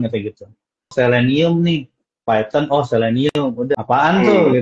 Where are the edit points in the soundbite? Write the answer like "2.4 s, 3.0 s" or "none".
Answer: 0.9 s, 3.7 s